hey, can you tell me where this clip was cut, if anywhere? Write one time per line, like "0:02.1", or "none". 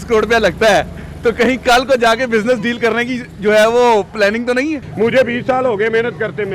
0:04.9